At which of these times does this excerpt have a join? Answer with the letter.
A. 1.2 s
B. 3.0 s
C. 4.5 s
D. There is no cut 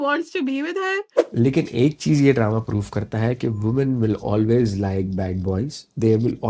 A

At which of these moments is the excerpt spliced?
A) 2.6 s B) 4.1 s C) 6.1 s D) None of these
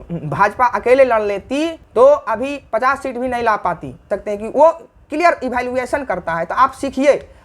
B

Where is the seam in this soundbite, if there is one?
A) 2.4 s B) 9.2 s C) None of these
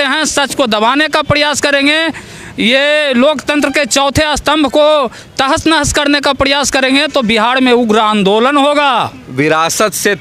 B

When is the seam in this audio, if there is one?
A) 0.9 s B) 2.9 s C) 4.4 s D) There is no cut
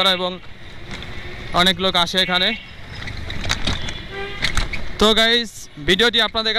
D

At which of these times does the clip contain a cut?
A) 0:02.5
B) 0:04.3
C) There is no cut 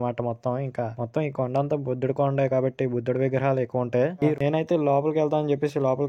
B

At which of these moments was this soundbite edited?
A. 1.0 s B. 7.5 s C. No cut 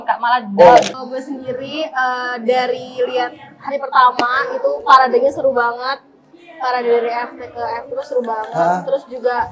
A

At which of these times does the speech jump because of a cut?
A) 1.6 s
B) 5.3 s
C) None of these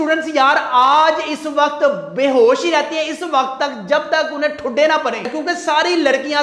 B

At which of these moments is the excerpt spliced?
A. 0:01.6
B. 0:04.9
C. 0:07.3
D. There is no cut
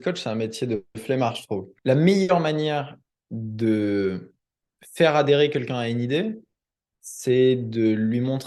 A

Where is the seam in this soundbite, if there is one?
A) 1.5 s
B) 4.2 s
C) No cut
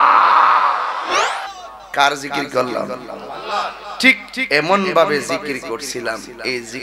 A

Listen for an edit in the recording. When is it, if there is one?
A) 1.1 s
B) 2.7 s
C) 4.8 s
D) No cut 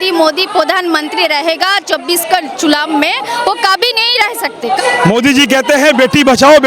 C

